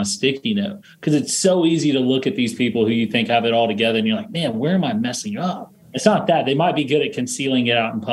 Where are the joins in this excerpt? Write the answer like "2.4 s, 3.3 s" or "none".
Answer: 5.7 s